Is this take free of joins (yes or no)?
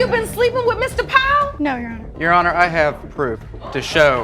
no